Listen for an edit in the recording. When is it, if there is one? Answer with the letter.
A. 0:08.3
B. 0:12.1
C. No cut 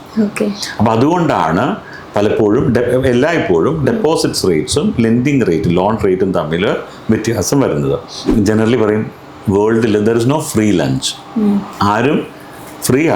A